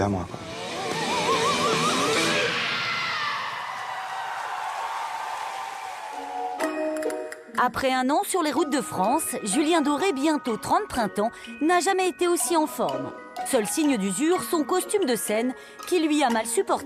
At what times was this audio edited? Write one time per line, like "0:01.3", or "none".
0:08.6